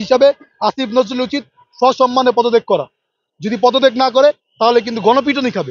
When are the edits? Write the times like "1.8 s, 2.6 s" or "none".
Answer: none

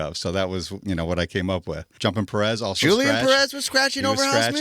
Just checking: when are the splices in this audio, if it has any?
1.9 s

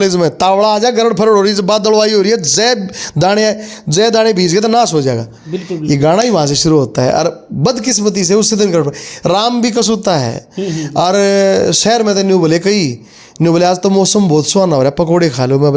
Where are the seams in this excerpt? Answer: none

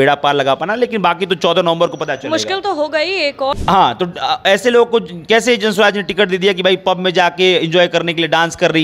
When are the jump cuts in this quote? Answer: 3.5 s

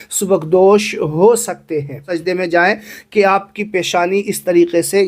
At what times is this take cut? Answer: 2.1 s

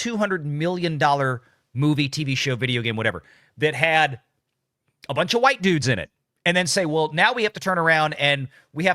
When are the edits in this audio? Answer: none

